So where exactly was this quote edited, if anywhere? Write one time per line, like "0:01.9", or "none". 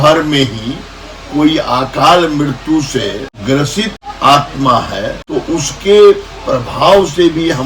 0:03.3
0:04.0
0:05.2